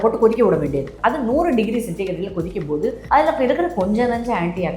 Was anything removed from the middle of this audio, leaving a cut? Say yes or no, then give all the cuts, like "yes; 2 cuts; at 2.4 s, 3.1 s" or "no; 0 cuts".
yes; 1 cut; at 3.0 s